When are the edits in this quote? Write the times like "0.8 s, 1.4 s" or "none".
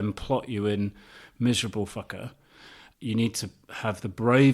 2.8 s

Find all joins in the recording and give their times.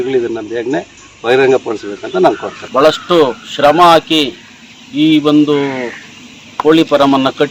2.5 s

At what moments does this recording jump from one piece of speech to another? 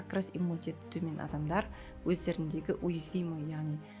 none

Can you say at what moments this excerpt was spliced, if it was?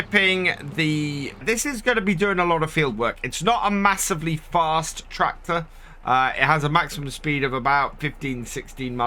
1.4 s

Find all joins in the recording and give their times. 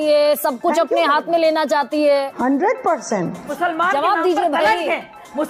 2.3 s, 3.5 s

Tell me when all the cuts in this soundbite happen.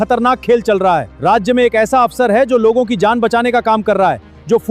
1.1 s

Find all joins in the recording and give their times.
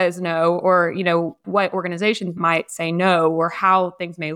1.4 s, 2.4 s

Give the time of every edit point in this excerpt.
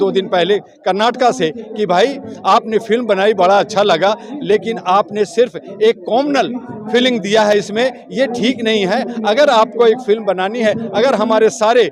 none

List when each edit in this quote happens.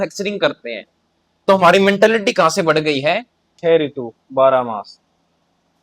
3.4 s

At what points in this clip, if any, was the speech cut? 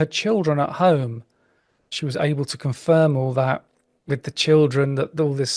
1.9 s

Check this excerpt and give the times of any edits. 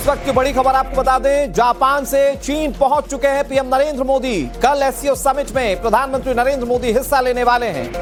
none

